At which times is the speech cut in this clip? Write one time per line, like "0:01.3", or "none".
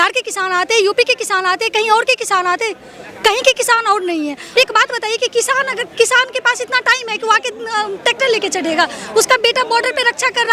0:04.4